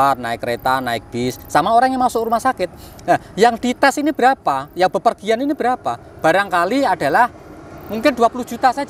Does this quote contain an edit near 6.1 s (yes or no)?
no